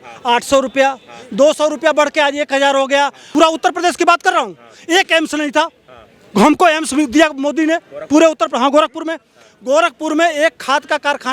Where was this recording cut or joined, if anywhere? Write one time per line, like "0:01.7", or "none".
0:03.2

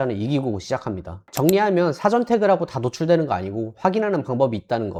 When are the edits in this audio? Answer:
none

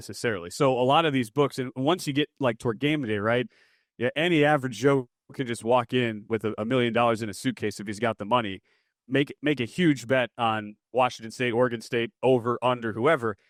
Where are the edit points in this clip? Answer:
none

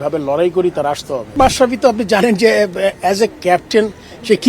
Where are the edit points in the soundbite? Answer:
0:01.3

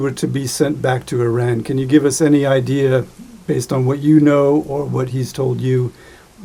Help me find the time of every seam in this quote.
none

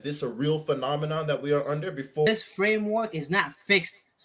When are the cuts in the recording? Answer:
0:02.3

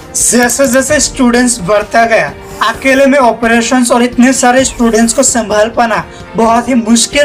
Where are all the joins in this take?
none

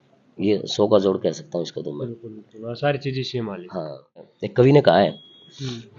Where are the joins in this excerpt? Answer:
0:04.4

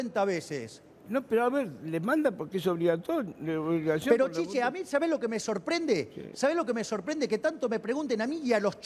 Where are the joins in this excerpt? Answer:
none

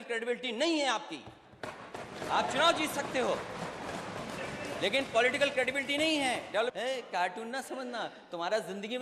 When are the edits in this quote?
0:06.7

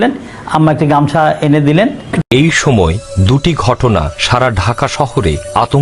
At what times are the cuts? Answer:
0:02.2

